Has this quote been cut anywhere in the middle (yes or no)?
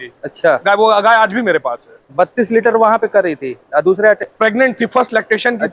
no